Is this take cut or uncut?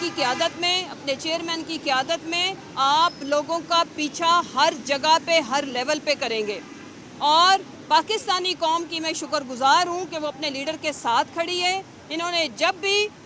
uncut